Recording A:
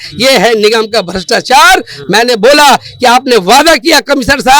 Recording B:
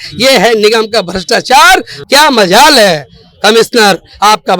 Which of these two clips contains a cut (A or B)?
B